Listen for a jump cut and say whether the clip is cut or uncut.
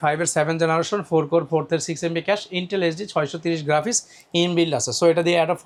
uncut